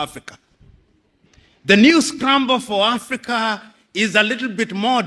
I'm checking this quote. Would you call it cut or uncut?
uncut